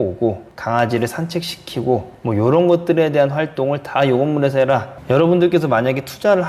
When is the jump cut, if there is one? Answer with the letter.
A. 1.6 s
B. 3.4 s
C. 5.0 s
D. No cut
C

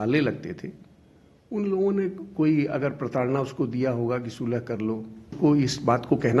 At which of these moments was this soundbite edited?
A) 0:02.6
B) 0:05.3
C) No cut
B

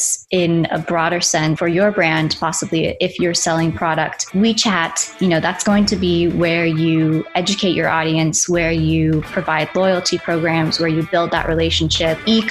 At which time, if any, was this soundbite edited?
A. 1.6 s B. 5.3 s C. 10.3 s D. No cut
A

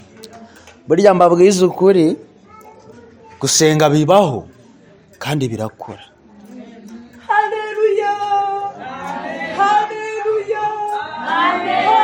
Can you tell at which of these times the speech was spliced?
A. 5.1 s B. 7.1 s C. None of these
C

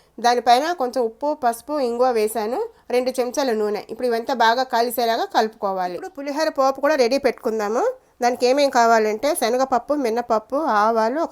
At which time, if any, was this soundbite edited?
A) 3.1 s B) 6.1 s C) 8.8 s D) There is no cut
B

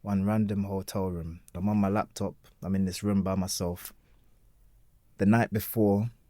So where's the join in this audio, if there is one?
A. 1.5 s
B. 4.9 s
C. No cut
A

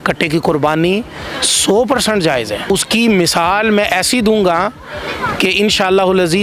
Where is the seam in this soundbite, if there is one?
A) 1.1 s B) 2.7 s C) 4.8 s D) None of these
B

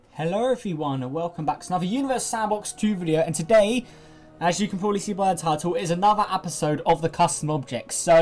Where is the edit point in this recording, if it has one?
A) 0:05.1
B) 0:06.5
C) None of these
C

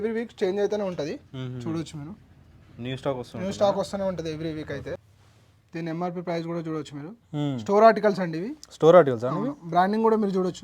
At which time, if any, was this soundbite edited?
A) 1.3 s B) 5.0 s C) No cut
B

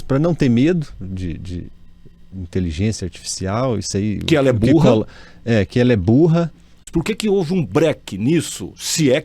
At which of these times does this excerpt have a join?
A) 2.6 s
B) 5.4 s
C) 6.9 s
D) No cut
C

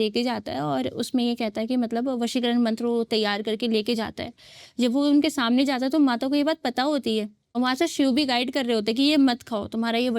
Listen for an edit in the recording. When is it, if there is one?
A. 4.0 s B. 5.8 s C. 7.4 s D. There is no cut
C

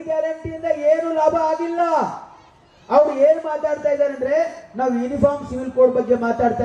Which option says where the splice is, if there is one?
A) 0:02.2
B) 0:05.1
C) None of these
C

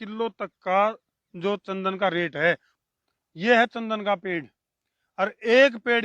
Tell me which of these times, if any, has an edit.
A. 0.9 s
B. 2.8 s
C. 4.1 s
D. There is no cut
B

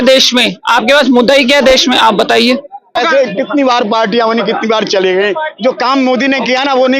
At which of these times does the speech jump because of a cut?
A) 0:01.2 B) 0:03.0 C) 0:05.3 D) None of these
B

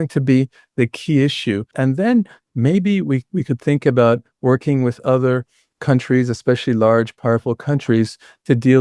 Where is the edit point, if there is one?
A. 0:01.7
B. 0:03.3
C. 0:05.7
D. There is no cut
A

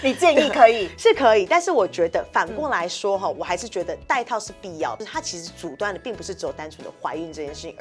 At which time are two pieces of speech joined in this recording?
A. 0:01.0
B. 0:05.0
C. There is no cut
B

